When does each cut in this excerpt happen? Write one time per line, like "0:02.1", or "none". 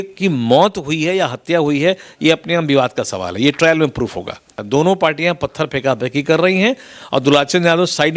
0:04.6